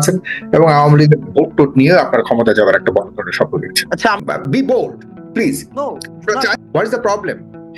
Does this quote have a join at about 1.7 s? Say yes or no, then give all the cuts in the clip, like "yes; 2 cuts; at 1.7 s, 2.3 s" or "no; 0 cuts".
no; 2 cuts; at 4.2 s, 6.5 s